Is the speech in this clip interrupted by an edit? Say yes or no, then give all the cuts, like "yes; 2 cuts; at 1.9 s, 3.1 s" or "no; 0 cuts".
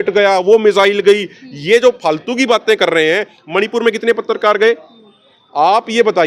no; 0 cuts